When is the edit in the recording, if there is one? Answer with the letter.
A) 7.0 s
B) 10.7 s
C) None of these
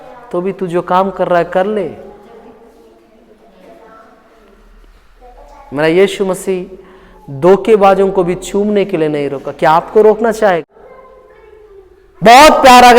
B